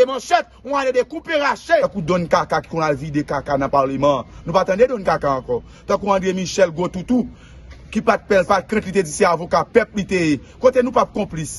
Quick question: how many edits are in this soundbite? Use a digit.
1